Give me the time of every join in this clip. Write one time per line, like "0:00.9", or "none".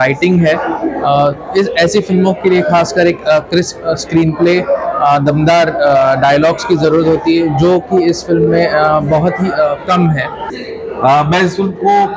0:10.4